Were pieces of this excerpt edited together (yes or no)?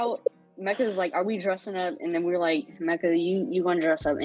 no